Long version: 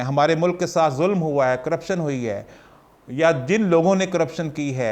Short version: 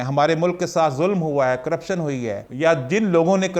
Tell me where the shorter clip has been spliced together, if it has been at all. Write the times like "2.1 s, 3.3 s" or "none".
2.5 s